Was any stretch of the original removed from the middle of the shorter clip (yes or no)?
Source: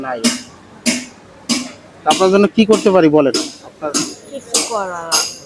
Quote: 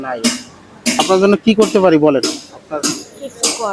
yes